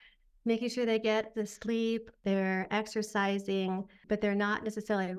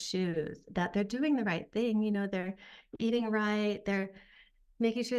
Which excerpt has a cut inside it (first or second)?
first